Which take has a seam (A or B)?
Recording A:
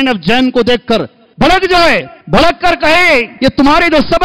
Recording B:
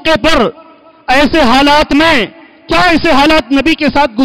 A